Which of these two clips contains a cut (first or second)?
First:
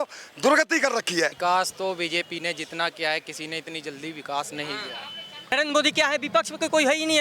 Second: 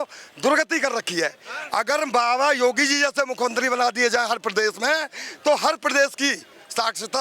first